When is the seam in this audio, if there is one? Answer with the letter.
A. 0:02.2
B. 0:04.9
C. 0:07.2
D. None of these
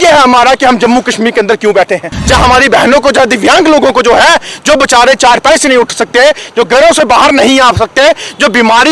A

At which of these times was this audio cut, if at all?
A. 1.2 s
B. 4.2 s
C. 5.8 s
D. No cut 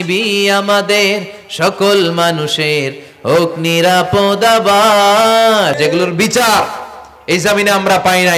C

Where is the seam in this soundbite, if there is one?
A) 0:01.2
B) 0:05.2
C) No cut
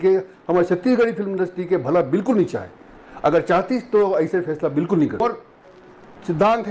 B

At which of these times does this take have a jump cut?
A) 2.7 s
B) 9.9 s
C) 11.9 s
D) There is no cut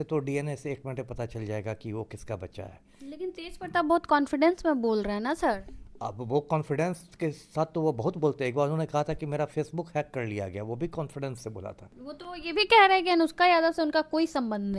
C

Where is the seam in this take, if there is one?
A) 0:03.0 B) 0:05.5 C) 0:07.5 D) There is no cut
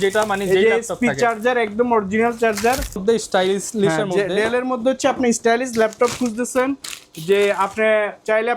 A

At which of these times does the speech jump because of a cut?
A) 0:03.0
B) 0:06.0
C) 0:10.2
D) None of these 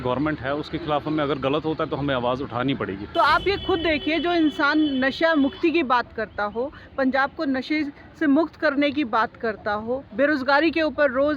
A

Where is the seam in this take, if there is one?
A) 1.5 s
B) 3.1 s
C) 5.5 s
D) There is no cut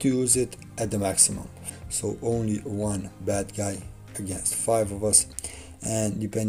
A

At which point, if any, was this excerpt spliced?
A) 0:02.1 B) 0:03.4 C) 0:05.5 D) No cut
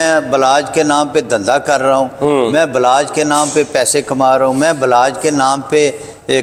D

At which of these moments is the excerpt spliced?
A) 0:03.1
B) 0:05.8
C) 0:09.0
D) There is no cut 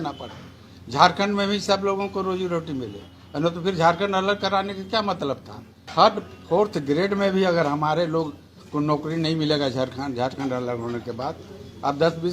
B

